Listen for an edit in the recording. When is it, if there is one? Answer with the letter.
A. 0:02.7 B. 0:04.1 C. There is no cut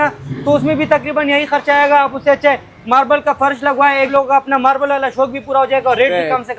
B